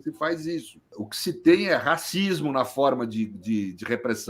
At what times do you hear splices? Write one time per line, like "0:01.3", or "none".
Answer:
0:01.0